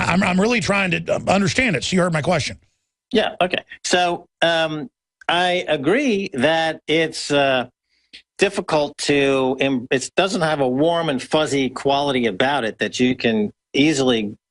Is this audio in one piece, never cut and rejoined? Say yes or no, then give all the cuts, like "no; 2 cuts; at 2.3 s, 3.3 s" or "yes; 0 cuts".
no; 1 cut; at 7.5 s